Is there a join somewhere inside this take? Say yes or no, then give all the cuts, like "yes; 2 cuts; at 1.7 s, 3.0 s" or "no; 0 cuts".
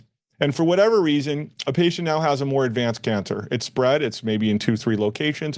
no; 0 cuts